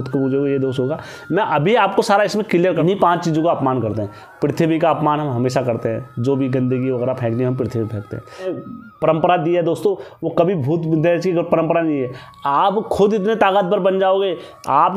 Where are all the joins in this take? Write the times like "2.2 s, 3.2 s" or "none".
2.8 s, 8.5 s